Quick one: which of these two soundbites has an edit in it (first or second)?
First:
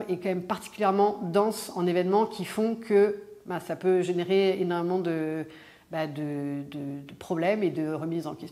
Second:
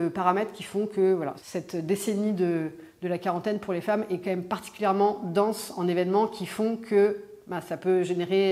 second